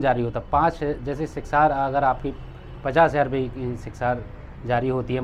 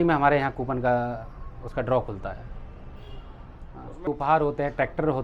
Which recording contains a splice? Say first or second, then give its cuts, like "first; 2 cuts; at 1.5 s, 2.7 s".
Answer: second; 1 cut; at 4.1 s